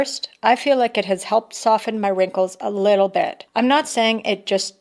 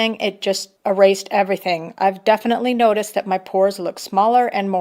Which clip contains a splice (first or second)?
second